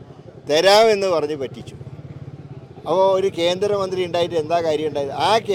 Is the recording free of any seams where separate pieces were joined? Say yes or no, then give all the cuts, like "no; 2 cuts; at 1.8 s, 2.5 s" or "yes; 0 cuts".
yes; 0 cuts